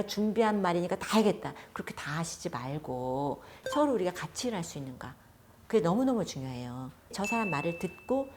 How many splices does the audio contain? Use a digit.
2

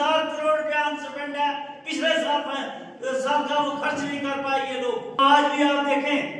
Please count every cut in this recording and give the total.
1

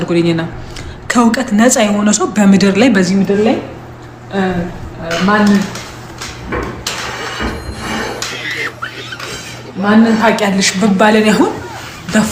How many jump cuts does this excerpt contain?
0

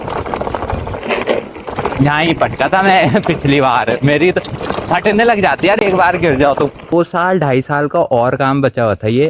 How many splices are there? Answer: 1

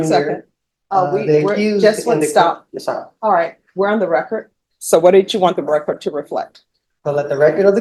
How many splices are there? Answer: 0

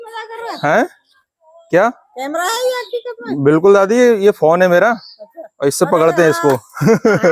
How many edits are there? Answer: 0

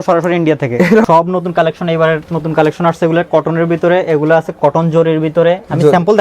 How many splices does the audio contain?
1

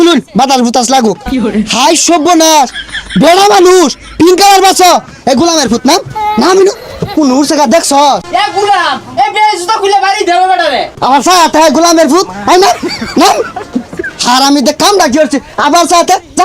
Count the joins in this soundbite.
2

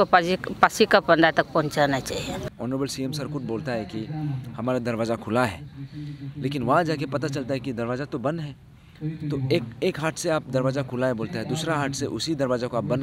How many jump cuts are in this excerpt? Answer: 1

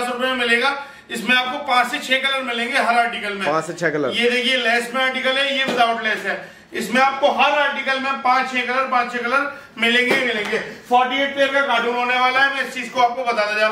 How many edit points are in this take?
0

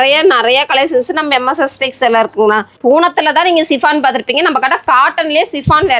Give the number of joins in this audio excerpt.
1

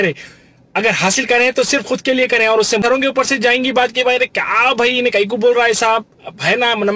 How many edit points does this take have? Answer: 1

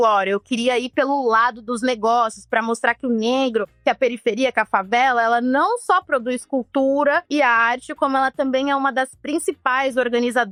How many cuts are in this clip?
0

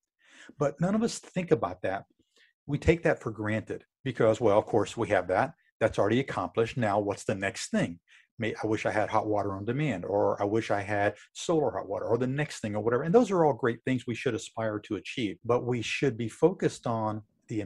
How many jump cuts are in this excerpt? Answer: 1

